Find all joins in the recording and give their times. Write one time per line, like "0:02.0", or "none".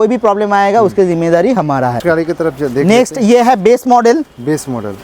none

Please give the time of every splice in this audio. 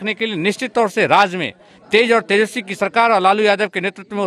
none

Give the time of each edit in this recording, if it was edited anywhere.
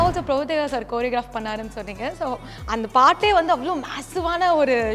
none

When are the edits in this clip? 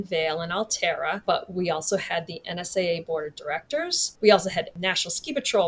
0:01.2
0:04.0
0:04.7

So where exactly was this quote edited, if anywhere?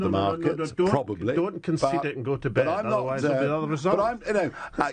0:01.8

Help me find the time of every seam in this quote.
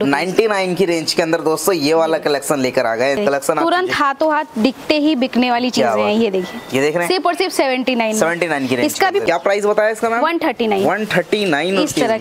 0:03.2
0:09.2

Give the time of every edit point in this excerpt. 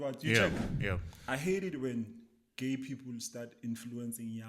0:01.1

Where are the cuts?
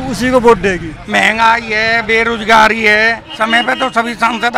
0:01.0
0:03.2

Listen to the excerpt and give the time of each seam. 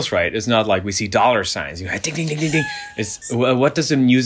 0:03.1

